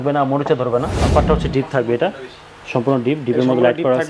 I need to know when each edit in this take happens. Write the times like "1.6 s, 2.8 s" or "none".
1.0 s

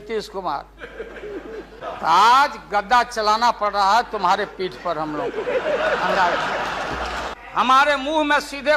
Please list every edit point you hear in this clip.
1.8 s, 7.3 s

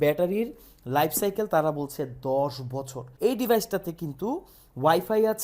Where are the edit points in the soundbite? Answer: 3.0 s

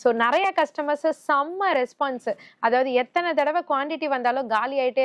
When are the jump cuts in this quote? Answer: none

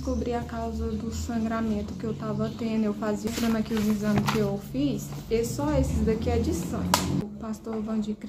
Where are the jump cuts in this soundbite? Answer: 3.3 s, 7.2 s

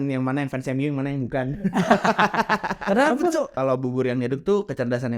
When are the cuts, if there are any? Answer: 3.5 s

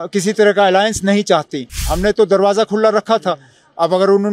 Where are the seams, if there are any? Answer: 1.9 s

